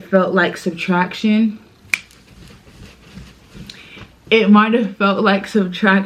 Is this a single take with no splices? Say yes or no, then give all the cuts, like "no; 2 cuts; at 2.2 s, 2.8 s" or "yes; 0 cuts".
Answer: yes; 0 cuts